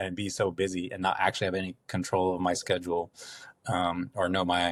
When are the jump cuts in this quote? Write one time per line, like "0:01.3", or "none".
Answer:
none

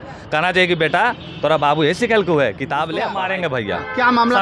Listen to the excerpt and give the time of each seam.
0:03.2

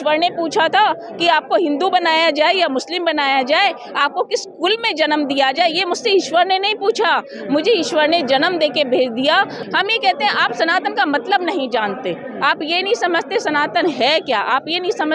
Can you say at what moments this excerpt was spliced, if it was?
0:09.6

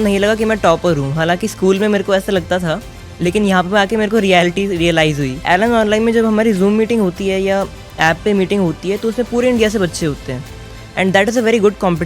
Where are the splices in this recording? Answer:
0:05.4

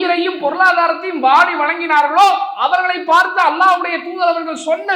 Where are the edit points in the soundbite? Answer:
none

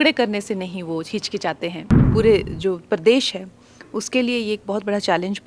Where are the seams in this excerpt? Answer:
0:01.9

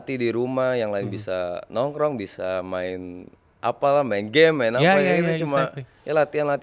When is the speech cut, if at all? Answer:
none

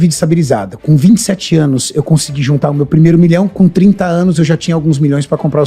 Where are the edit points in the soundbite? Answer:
none

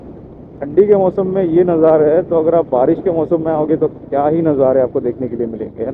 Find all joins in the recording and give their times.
none

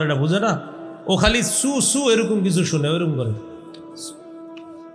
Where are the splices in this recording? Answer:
0:03.8

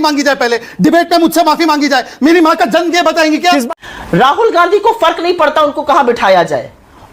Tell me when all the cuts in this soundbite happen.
0:03.7

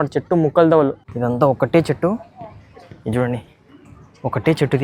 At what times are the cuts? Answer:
0:01.0

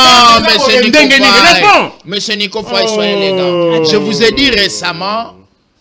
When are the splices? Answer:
none

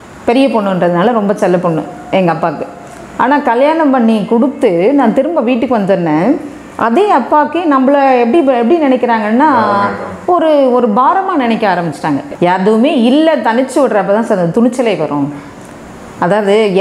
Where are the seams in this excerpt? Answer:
0:12.3

